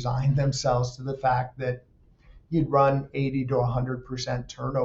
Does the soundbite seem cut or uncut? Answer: uncut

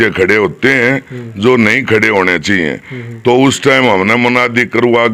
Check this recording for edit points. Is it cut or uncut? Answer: uncut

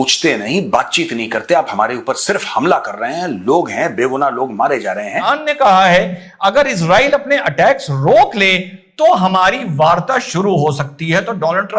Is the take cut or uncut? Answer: cut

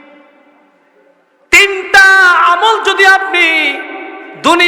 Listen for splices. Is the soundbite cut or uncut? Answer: uncut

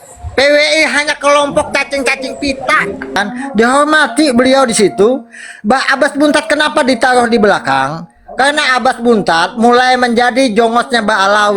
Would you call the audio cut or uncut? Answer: cut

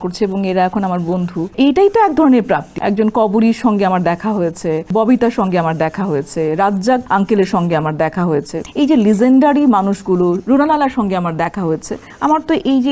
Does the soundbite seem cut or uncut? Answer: cut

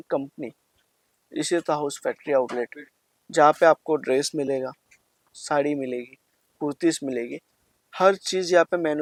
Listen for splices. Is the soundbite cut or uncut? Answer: uncut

